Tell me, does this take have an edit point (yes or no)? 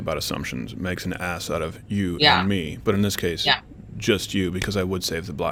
no